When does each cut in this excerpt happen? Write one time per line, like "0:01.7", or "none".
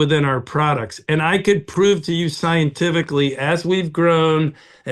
none